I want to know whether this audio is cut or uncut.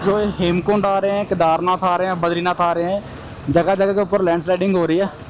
uncut